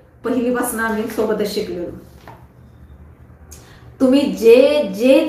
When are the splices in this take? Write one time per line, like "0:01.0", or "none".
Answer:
none